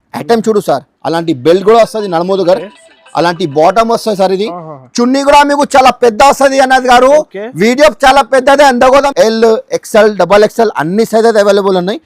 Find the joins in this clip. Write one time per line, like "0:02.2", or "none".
0:09.1